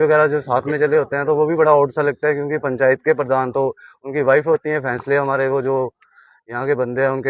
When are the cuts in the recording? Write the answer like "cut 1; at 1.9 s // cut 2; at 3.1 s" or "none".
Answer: none